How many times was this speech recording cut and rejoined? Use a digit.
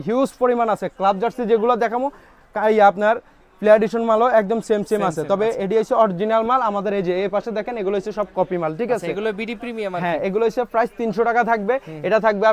0